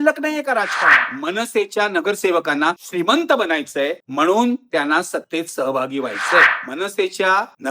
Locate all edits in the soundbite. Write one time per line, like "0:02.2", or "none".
0:01.0
0:06.5